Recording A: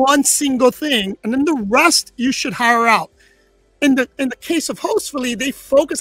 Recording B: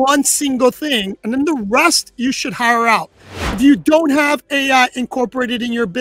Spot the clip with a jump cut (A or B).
B